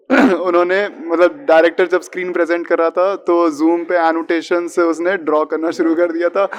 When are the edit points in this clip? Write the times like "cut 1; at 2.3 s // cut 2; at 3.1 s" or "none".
none